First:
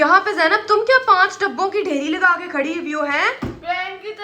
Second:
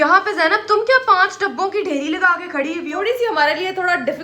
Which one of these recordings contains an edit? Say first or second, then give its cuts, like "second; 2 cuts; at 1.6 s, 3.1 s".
second; 1 cut; at 2.9 s